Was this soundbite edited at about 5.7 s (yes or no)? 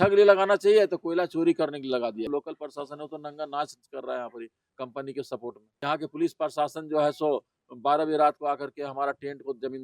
yes